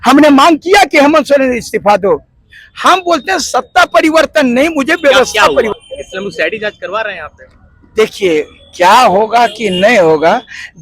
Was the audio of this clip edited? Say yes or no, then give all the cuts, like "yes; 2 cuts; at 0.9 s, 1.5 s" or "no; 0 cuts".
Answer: yes; 1 cut; at 5.7 s